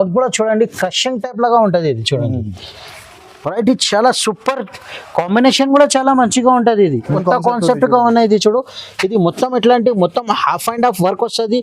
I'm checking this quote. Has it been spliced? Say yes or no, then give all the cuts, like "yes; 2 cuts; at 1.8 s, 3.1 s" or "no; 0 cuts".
yes; 1 cut; at 7.2 s